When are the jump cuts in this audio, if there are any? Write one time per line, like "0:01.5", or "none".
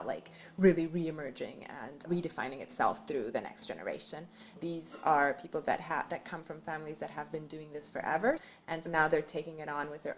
0:02.1
0:04.6
0:08.4